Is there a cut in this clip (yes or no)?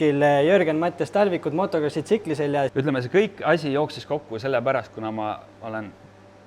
yes